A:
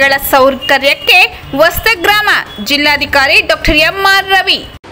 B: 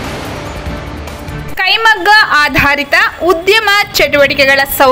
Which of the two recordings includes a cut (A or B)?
B